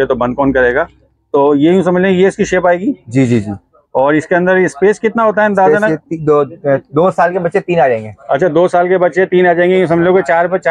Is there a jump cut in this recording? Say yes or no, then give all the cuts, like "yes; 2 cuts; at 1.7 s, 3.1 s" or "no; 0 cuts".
no; 0 cuts